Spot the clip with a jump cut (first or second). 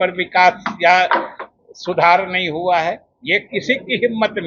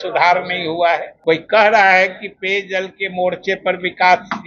second